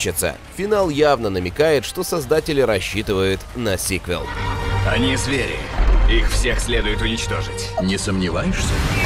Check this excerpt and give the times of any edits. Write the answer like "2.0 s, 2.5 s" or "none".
none